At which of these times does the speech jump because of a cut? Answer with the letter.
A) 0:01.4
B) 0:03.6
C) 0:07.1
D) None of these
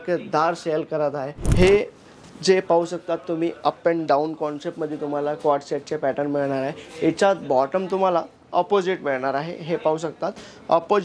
A